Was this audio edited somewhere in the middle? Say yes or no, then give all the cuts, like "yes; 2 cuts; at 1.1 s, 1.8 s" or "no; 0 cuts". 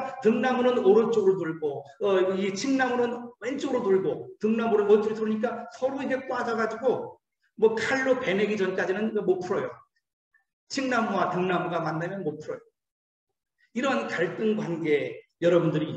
no; 0 cuts